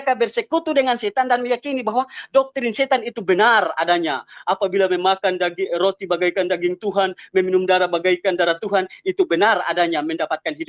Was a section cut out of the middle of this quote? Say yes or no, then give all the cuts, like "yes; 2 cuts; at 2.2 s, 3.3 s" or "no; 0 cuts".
no; 0 cuts